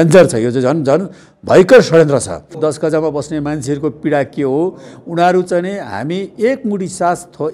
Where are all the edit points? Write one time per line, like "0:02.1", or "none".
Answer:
0:02.6